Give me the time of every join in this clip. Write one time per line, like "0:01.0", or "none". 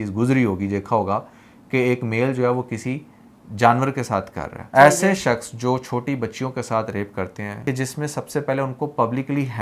0:04.7
0:07.5